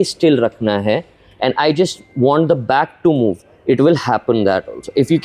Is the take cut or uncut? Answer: uncut